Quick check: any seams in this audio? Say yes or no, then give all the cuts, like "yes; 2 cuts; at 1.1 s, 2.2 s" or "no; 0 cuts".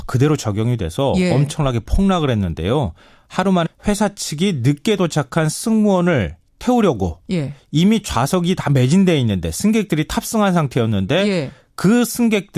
no; 0 cuts